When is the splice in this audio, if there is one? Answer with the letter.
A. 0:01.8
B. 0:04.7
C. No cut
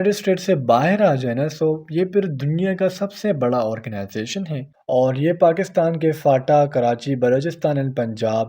B